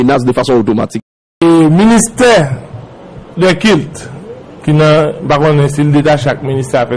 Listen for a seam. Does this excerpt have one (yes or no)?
yes